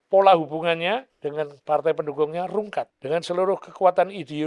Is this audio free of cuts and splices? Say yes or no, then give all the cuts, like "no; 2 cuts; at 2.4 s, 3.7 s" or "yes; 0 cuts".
no; 2 cuts; at 1.2 s, 2.9 s